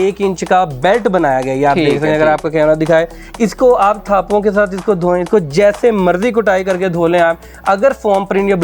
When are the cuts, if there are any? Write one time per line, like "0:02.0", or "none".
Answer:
0:03.2